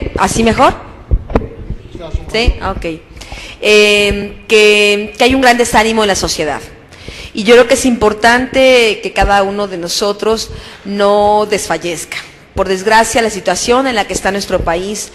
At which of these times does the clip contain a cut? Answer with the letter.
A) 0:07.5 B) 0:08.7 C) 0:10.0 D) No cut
C